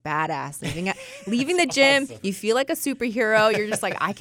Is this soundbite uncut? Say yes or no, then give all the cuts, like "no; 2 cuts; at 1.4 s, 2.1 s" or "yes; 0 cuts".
yes; 0 cuts